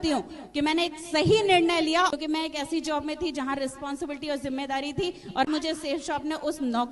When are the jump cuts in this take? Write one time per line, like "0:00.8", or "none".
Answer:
0:02.1
0:05.5

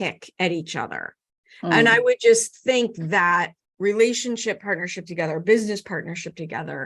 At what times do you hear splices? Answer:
0:03.6

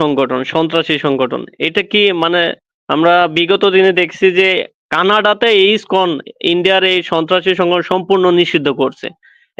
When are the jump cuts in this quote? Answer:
none

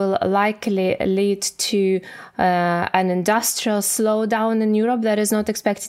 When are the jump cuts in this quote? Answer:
none

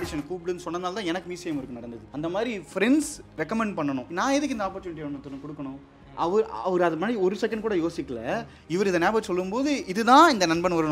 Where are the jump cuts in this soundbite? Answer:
0:02.1
0:03.2
0:04.1

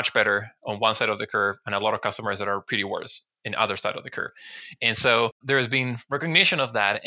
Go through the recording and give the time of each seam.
0:05.4

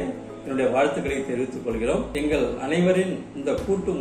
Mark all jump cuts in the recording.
0:02.1

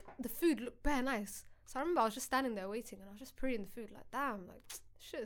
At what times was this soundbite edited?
none

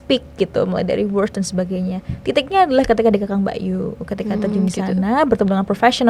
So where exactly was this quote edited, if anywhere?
none

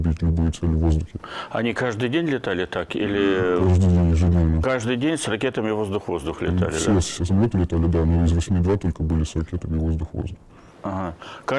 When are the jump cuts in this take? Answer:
0:08.1

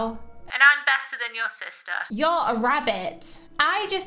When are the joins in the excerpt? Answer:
0:01.9

